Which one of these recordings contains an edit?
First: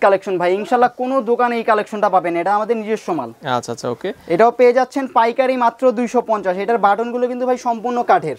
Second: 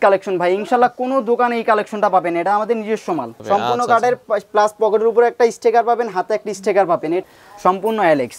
second; 2 cuts; at 3.4 s, 7.2 s

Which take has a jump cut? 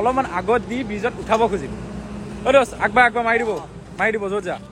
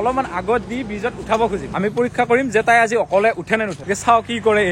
second; 2 cuts; at 1.7 s, 3.8 s

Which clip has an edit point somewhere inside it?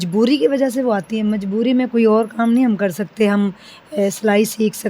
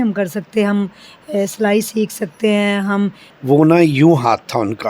second; 1 cut; at 3.3 s

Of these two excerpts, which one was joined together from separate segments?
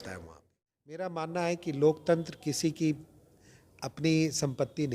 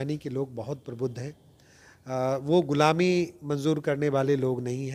first; 1 cut; at 1.1 s

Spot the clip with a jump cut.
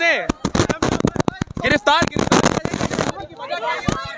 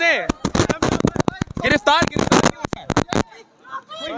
first; 1 cut; at 2.5 s

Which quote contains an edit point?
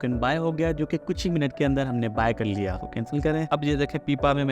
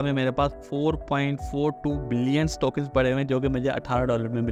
first; 1 cut; at 3.4 s

